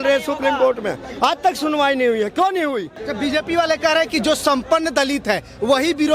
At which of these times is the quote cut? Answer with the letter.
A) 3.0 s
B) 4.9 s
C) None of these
A